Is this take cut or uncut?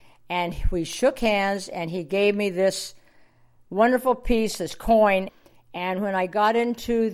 cut